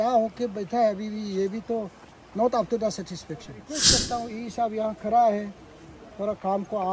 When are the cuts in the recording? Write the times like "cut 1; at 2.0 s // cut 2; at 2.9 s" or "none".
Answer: cut 1; at 3.9 s